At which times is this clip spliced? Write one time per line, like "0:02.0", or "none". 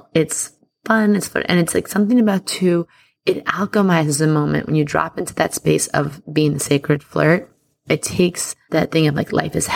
0:07.7
0:08.5